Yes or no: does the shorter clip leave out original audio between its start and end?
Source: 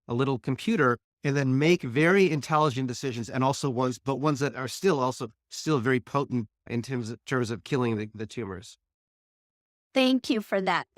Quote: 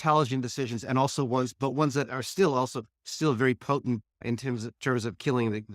no